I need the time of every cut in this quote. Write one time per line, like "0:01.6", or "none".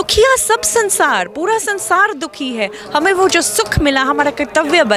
none